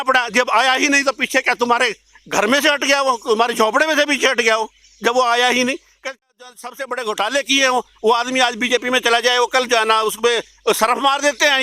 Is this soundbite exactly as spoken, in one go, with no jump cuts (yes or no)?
no